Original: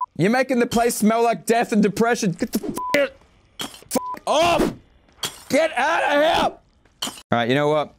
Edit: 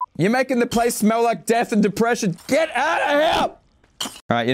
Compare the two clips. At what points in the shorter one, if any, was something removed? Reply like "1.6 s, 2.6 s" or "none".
2.4 s